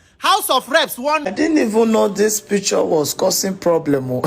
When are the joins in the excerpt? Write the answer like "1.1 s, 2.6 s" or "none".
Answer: 1.2 s